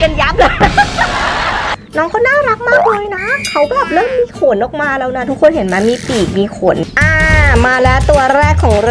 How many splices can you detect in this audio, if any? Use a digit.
2